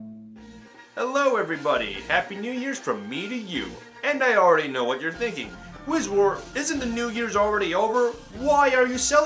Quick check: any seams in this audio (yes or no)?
no